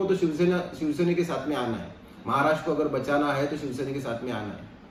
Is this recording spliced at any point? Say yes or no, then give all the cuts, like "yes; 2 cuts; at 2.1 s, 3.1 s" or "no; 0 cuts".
no; 0 cuts